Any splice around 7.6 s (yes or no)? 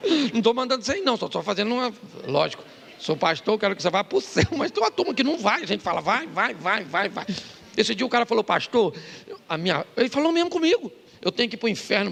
no